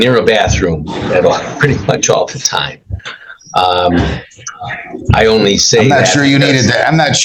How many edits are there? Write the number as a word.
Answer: one